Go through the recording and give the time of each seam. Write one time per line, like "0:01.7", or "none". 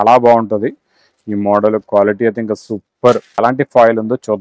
0:03.4